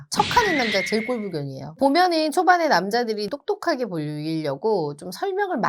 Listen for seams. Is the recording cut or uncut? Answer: cut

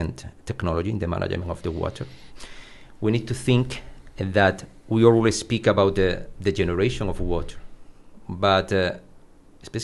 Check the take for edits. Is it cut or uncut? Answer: uncut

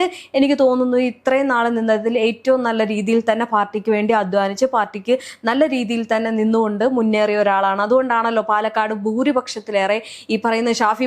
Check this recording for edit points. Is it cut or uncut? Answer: uncut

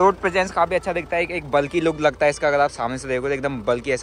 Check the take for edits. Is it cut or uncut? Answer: uncut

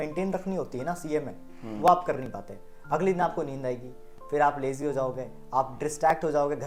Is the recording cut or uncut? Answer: uncut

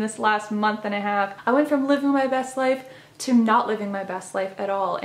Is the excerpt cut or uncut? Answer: cut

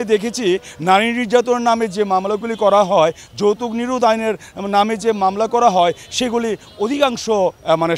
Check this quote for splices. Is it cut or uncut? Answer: uncut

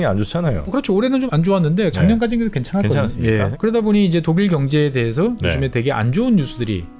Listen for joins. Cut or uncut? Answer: cut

